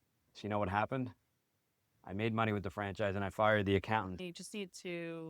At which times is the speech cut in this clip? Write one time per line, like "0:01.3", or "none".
0:04.2